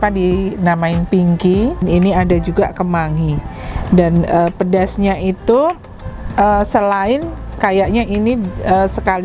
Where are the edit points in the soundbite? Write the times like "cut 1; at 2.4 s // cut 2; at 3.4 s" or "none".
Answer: cut 1; at 1.8 s